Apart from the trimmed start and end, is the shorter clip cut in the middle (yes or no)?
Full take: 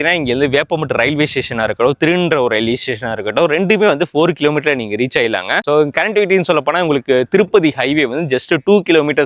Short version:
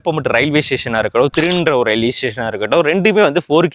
no